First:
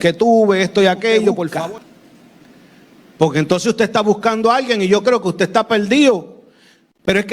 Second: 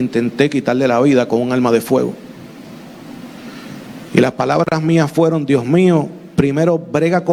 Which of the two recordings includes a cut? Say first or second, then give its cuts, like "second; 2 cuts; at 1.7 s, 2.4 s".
first; 1 cut; at 1.5 s